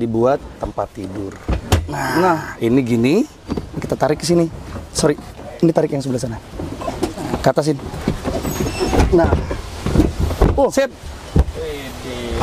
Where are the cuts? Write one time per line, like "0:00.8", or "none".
none